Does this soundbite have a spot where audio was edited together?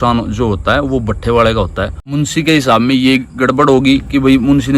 yes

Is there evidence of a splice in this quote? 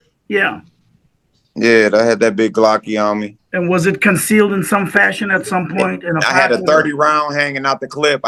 no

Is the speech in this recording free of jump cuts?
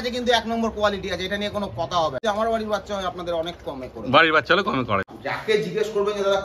no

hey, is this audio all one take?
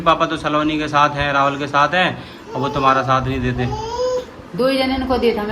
yes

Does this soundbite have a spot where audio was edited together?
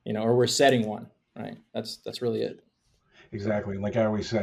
no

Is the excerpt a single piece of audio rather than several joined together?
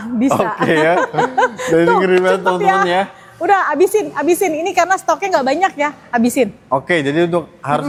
yes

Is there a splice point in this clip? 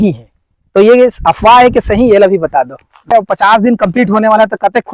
yes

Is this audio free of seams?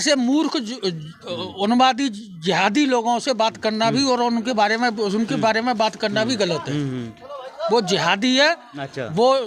yes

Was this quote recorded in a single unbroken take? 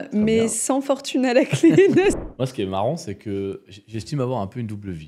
no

